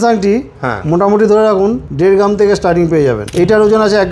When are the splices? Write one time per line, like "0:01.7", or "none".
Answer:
0:01.9
0:03.2